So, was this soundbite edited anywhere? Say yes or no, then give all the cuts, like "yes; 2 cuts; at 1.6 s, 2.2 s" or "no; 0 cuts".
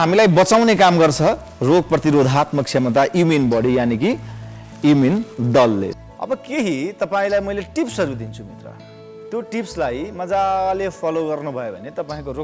yes; 1 cut; at 5.9 s